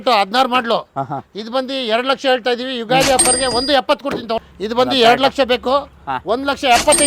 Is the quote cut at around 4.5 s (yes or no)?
yes